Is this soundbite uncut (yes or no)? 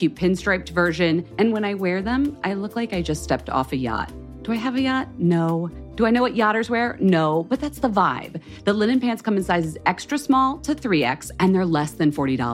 yes